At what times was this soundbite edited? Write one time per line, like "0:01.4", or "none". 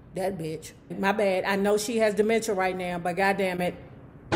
0:00.9